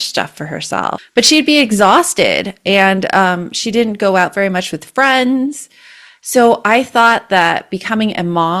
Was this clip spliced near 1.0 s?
yes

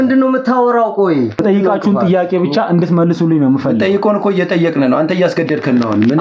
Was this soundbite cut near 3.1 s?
no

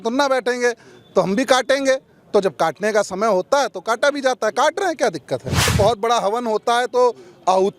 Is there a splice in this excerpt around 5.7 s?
yes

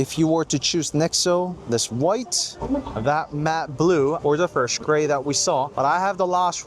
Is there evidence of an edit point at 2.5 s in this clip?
no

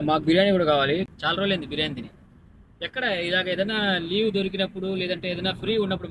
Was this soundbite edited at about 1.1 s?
yes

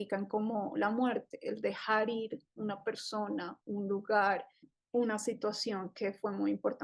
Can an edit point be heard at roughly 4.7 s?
yes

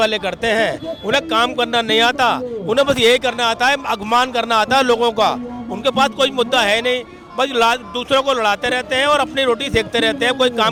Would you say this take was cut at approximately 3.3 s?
no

